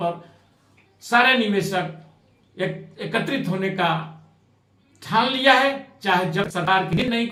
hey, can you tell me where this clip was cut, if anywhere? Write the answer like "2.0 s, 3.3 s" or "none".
none